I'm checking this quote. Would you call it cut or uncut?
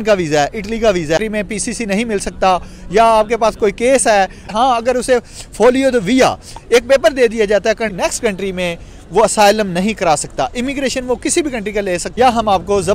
cut